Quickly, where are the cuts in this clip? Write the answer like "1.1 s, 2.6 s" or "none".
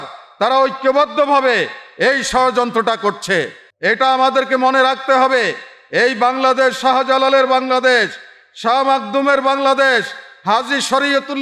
3.6 s